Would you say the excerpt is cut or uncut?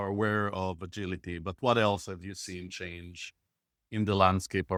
uncut